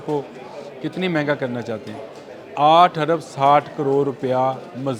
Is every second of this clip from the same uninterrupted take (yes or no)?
yes